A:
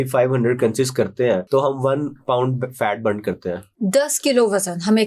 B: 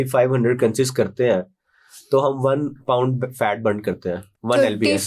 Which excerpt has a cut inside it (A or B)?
A